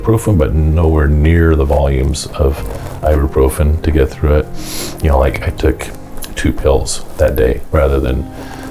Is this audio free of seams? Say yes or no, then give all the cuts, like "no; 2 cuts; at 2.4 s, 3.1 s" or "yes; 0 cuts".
yes; 0 cuts